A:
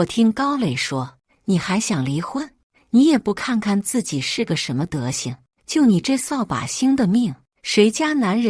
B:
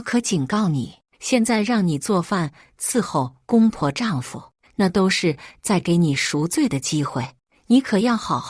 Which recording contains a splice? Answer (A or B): B